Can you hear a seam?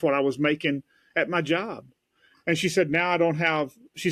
no; 0 cuts

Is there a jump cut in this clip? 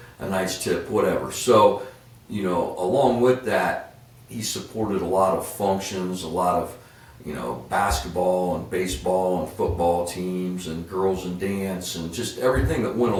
no; 0 cuts

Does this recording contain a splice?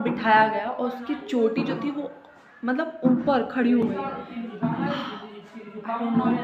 no; 0 cuts

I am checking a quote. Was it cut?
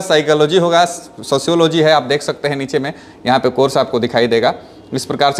no; 0 cuts

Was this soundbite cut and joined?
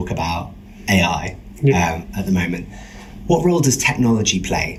no; 0 cuts

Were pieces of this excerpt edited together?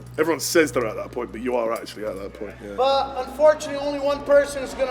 yes; 1 cut; at 2.6 s

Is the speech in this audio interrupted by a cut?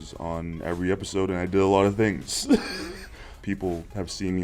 yes; 1 cut; at 3.4 s

